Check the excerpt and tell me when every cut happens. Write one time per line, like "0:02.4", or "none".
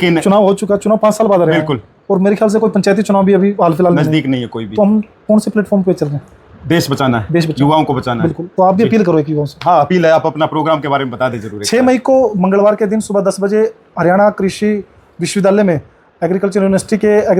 none

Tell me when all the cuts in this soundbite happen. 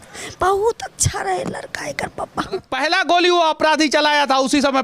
0:02.7

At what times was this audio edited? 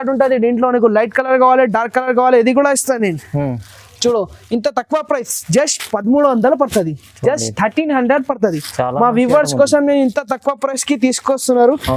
none

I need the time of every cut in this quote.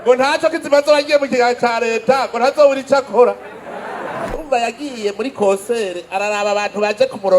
0:04.4

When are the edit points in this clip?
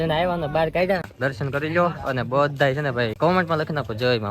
0:01.1
0:03.1

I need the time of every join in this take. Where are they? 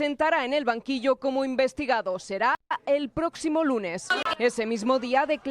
0:02.7
0:04.2

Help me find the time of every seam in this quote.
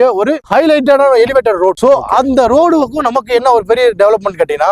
none

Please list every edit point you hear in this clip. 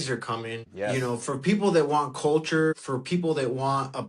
none

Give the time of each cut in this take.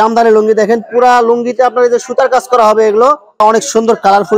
0:03.3

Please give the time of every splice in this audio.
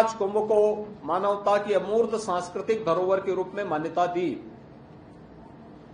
none

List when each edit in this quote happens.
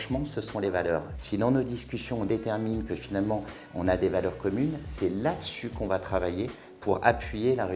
0:01.1

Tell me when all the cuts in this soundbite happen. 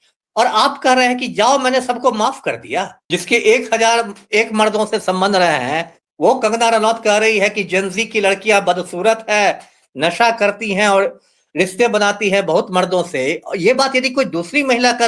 0:03.0

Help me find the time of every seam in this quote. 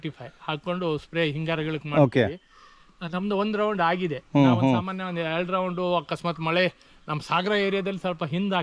none

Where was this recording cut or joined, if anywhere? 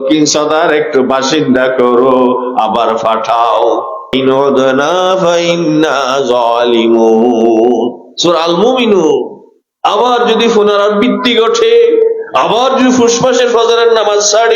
0:04.1

